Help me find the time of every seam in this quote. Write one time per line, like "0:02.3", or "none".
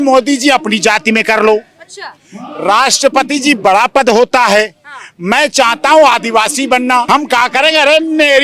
0:07.1

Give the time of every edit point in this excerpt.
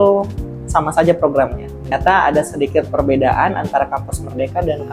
0:01.9

